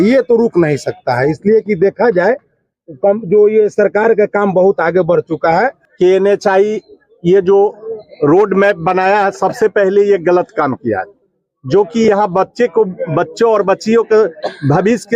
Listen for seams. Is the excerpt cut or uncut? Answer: cut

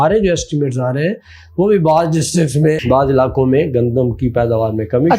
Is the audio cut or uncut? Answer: cut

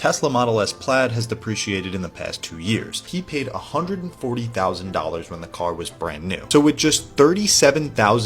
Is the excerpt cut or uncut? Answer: cut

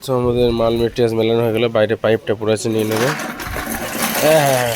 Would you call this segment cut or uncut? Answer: uncut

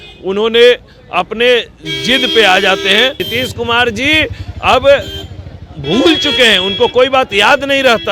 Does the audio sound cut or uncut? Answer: cut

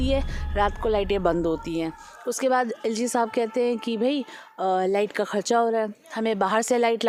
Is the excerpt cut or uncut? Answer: uncut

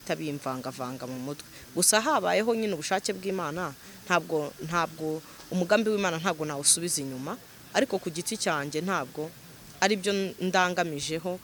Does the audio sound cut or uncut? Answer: uncut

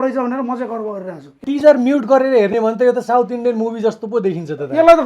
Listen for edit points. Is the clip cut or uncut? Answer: cut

